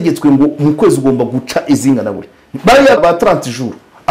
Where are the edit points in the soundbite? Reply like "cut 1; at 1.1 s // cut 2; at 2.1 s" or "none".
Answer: cut 1; at 3.0 s